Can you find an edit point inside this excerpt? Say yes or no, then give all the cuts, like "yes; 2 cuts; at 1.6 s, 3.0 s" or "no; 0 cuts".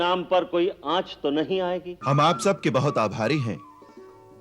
yes; 1 cut; at 1.9 s